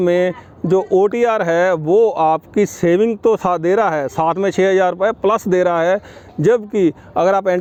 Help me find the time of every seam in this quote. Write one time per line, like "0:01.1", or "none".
none